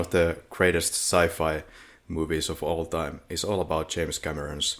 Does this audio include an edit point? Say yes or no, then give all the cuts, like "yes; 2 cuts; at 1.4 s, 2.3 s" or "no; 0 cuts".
no; 0 cuts